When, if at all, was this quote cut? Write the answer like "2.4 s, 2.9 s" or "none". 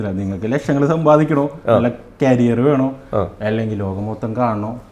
none